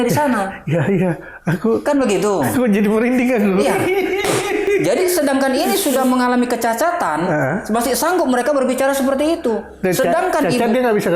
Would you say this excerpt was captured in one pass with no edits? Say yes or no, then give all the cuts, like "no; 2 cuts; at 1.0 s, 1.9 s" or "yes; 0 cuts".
yes; 0 cuts